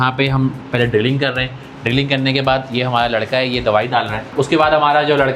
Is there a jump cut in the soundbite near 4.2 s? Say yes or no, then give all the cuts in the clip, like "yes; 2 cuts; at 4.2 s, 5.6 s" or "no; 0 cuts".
yes; 1 cut; at 4.2 s